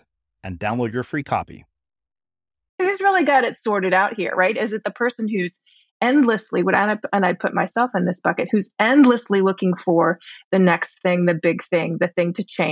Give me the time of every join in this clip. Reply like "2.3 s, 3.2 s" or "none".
2.8 s